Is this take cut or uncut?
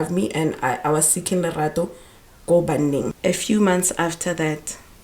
cut